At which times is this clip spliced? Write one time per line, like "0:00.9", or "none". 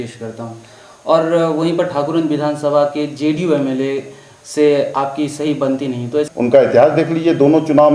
0:06.3